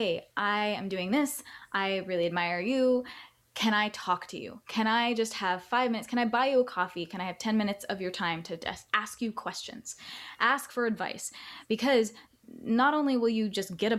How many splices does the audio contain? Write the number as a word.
one